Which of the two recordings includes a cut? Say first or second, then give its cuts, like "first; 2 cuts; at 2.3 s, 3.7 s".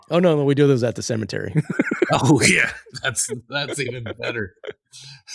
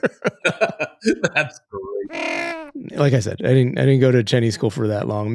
second; 1 cut; at 2.4 s